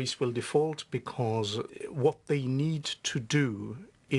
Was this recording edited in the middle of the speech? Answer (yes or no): yes